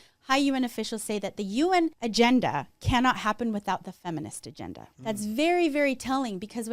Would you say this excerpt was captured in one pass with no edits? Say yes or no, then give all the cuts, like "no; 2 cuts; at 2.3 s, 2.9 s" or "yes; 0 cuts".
no; 2 cuts; at 2.0 s, 4.9 s